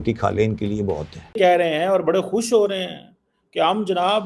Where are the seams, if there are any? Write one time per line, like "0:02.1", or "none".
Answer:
0:01.3